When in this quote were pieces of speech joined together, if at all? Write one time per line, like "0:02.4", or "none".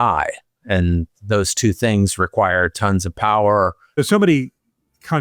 0:04.0